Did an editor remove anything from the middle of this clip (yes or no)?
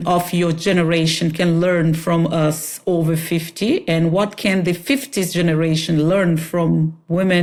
no